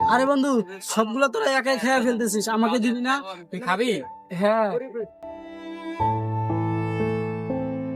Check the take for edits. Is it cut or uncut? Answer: cut